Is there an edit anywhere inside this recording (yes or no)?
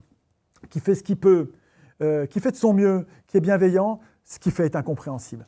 no